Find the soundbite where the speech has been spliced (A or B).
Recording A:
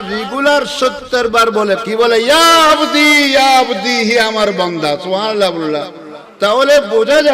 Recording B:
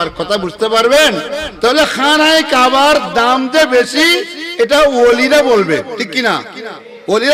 A